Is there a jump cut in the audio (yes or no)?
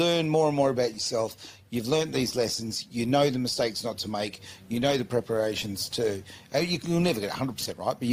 no